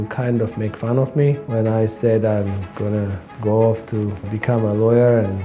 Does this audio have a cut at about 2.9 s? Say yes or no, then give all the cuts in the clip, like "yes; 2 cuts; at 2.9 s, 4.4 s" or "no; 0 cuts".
no; 2 cuts; at 1.4 s, 4.3 s